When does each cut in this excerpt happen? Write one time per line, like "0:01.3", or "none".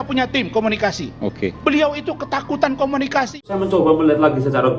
0:03.5